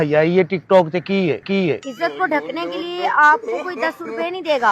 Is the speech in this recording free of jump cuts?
no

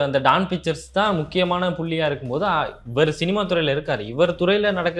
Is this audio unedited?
yes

